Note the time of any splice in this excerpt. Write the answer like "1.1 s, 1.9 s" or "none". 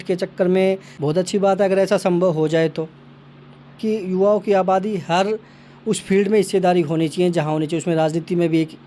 0.9 s, 3.7 s